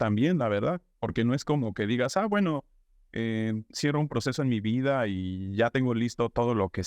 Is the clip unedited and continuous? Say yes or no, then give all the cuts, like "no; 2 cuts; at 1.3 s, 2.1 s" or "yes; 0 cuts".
yes; 0 cuts